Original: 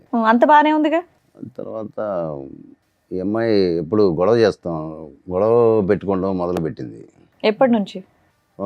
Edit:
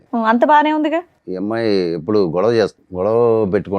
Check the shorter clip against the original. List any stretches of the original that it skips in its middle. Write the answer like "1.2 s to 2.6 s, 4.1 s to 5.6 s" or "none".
1.2 s to 3.1 s, 4.7 s to 5.2 s